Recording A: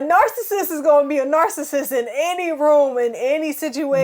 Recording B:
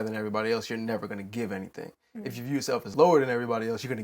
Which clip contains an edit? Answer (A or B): B